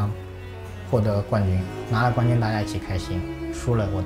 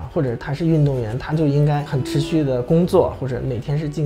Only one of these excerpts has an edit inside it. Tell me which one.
second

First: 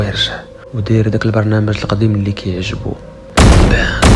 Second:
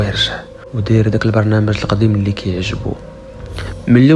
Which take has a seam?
first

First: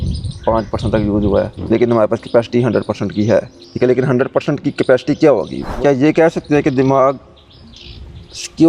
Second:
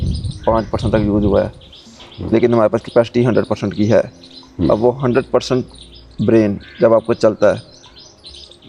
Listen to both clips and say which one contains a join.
first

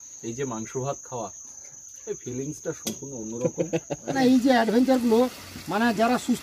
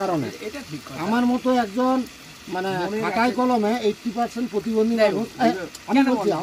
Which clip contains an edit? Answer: first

